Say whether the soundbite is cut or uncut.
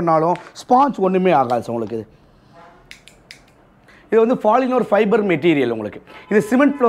uncut